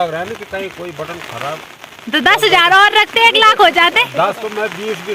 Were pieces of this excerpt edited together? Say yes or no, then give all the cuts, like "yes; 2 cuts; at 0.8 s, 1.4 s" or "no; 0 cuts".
no; 0 cuts